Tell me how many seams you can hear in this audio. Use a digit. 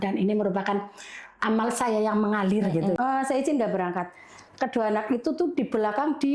1